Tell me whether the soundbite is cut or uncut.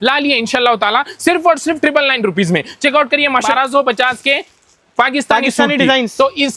cut